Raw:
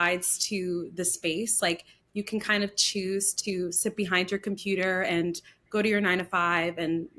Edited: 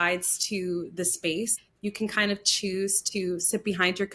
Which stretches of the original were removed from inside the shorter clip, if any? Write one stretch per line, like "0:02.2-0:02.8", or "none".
0:01.5-0:01.8